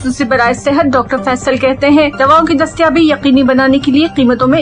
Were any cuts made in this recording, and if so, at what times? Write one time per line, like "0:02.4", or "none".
none

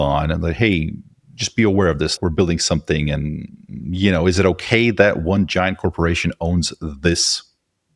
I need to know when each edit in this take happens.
0:02.1

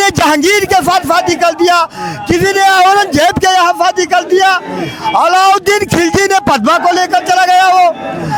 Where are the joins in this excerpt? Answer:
none

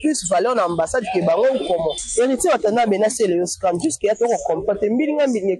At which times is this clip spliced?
0:02.0

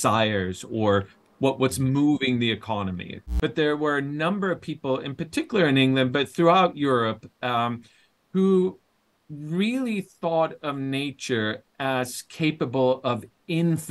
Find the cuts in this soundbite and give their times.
0:03.2

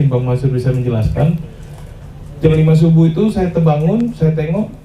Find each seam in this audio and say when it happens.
none

